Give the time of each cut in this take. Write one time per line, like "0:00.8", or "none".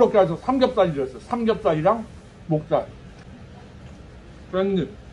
0:03.3